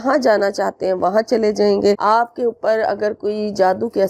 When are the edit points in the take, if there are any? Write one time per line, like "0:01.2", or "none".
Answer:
0:02.0